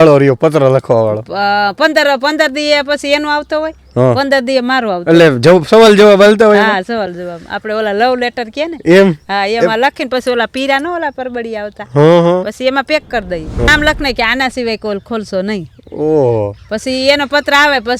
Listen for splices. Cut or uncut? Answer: cut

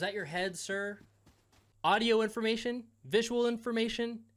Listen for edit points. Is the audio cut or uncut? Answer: cut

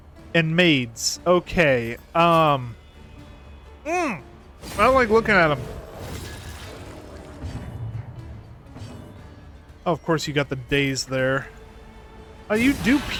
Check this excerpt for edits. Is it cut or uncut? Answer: uncut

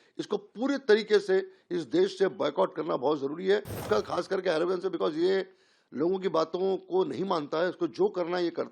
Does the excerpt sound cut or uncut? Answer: cut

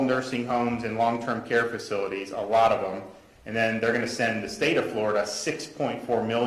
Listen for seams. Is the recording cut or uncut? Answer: uncut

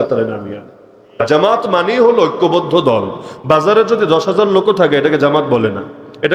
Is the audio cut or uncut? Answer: cut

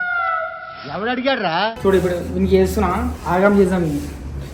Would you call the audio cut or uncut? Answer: uncut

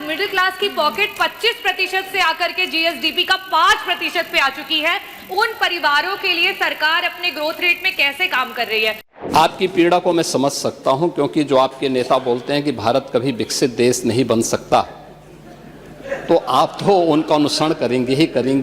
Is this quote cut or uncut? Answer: cut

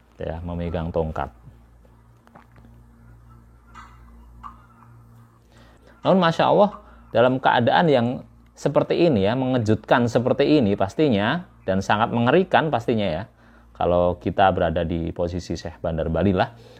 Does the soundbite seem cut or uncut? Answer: uncut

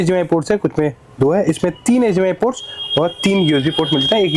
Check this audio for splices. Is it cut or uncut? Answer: uncut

